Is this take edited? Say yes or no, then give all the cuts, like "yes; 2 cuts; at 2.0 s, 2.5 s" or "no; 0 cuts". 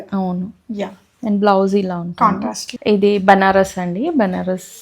yes; 1 cut; at 2.7 s